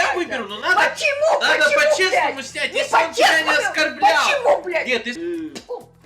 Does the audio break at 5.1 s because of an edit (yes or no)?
yes